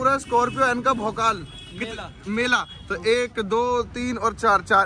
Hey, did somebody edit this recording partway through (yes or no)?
no